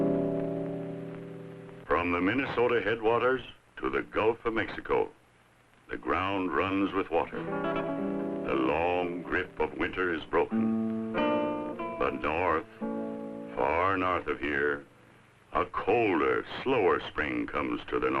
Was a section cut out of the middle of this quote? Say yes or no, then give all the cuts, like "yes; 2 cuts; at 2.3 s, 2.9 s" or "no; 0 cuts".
yes; 1 cut; at 2.5 s